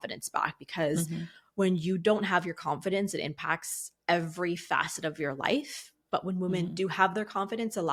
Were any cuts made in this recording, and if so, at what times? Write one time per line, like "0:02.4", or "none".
none